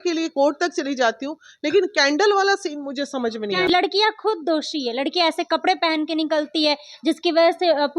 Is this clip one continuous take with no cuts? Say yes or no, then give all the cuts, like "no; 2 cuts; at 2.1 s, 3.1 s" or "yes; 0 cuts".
no; 1 cut; at 3.7 s